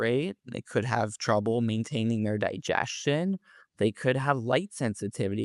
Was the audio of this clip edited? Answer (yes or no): no